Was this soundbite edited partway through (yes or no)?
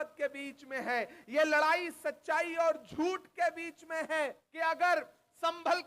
yes